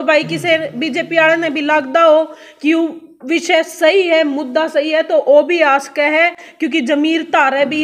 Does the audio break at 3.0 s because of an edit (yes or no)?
no